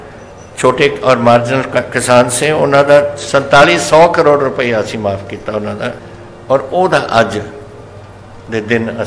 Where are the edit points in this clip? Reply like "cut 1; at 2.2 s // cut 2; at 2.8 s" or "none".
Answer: cut 1; at 6.1 s